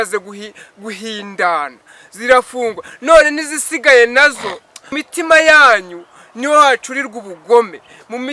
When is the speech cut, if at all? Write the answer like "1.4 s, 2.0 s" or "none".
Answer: 5.0 s